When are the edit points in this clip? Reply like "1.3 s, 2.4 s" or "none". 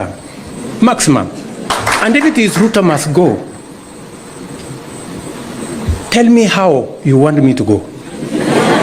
1.7 s